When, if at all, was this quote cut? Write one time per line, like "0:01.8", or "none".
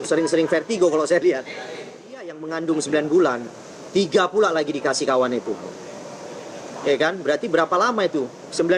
0:02.4